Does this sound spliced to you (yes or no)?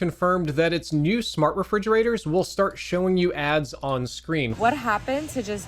yes